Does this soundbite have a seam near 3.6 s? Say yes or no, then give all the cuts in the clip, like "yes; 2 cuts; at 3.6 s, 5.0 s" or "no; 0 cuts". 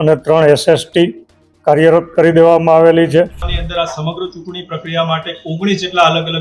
yes; 1 cut; at 3.6 s